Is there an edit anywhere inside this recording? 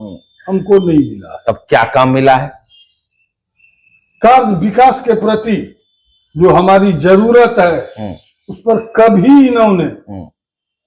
no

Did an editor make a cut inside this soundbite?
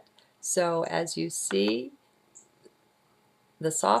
yes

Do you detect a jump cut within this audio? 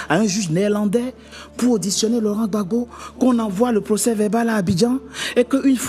no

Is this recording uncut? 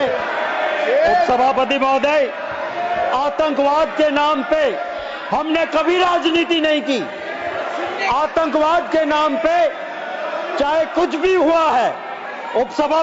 yes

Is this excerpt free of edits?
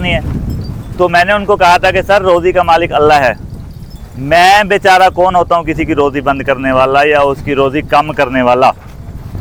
yes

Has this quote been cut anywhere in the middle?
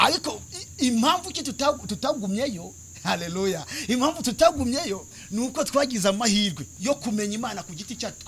yes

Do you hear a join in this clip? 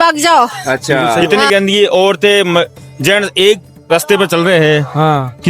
yes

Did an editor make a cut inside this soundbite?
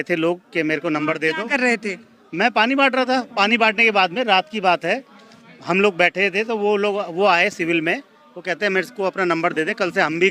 no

